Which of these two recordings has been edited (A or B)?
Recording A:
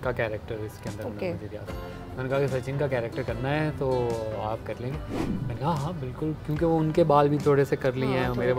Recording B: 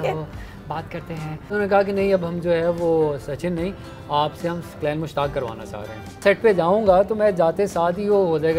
B